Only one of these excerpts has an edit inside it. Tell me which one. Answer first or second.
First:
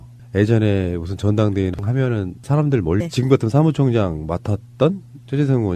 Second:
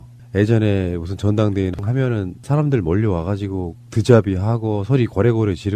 second